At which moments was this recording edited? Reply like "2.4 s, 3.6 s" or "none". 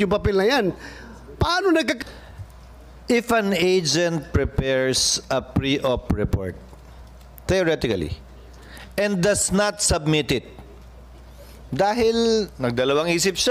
2.0 s